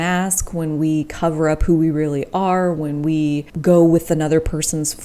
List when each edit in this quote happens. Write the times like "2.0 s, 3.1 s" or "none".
3.5 s